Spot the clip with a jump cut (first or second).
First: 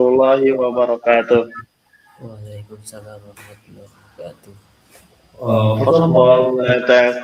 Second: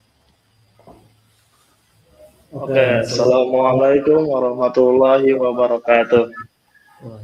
second